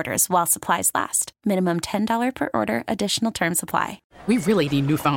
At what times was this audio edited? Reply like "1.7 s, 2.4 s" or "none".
4.1 s